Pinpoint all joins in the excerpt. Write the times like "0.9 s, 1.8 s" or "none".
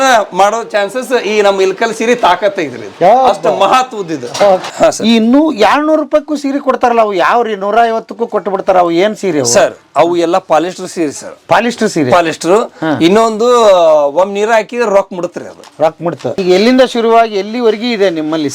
4.6 s, 16.4 s